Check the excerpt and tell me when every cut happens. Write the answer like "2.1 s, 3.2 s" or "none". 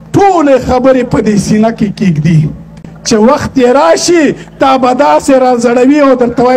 2.9 s